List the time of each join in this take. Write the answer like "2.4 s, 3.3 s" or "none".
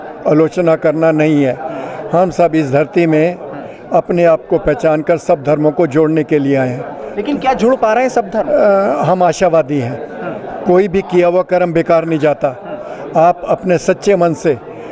none